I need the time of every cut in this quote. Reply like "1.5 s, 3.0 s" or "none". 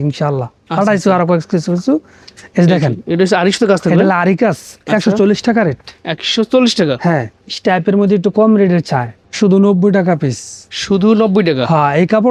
none